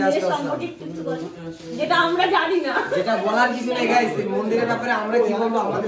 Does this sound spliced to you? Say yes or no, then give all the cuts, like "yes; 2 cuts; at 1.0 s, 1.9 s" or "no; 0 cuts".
no; 0 cuts